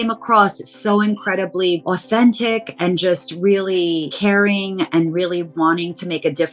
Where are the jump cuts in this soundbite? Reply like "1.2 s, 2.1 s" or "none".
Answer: 1.8 s, 4.1 s